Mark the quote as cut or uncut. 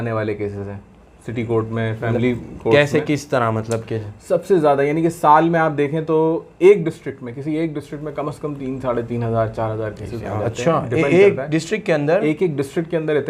uncut